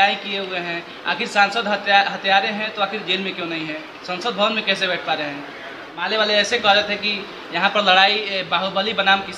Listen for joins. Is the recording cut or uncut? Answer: cut